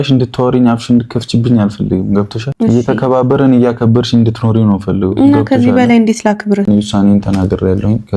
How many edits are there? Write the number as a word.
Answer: two